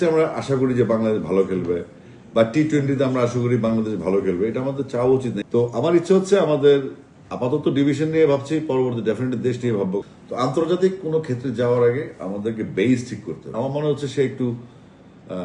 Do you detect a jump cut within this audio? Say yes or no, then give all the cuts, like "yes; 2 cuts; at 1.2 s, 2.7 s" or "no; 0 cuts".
yes; 3 cuts; at 5.4 s, 10.0 s, 13.5 s